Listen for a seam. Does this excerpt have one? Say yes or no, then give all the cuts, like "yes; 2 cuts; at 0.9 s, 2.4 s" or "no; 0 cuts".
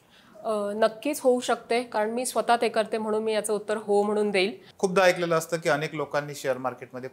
yes; 1 cut; at 4.6 s